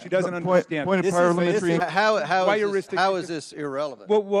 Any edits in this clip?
yes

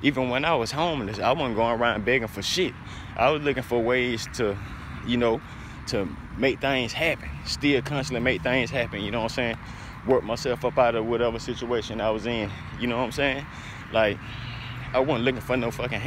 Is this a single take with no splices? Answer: yes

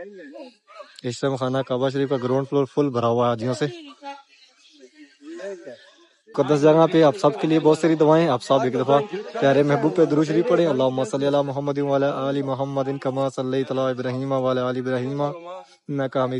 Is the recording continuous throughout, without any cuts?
no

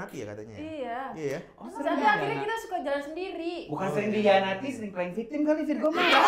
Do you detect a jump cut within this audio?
no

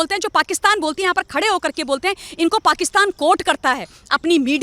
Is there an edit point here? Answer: no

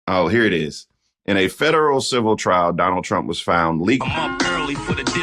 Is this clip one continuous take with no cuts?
no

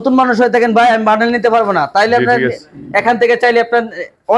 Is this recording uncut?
yes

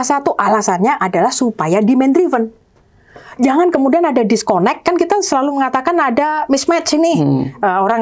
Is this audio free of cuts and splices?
yes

